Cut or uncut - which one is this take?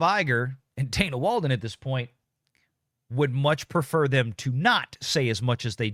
uncut